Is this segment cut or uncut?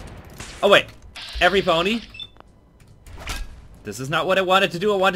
uncut